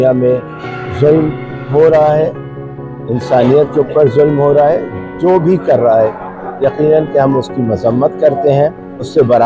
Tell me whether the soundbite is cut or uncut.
uncut